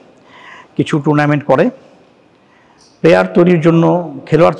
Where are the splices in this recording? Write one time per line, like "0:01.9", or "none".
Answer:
none